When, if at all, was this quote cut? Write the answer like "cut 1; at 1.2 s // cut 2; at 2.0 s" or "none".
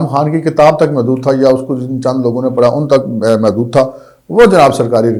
none